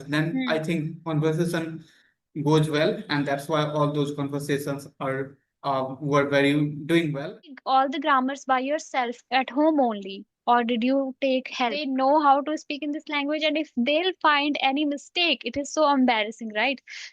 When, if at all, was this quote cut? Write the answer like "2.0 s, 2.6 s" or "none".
7.5 s, 11.8 s

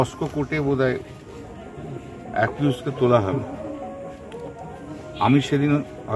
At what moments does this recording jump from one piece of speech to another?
none

